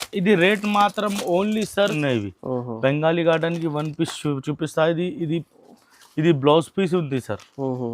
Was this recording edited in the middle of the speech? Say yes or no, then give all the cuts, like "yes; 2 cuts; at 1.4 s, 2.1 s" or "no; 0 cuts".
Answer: yes; 1 cut; at 1.9 s